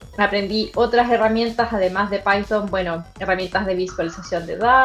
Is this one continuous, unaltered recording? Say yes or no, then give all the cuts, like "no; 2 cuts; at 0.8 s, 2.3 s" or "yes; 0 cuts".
yes; 0 cuts